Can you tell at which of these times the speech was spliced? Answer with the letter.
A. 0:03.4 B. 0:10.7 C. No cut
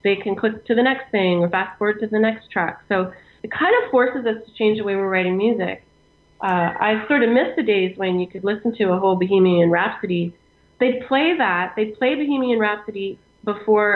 A